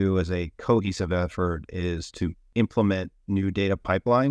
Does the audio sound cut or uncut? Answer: cut